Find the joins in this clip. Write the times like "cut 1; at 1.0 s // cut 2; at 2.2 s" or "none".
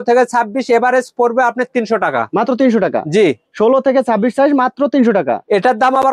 none